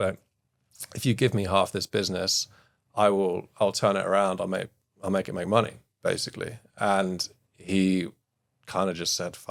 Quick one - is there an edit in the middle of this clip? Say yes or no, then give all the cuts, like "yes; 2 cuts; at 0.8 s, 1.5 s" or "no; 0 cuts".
no; 0 cuts